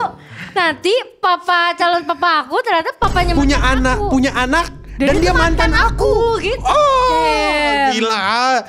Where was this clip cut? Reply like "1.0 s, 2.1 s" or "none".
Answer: none